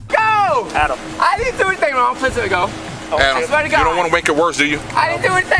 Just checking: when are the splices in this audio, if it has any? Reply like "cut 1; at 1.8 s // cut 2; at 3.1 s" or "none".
none